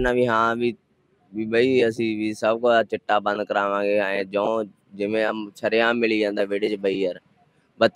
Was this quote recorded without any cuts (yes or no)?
yes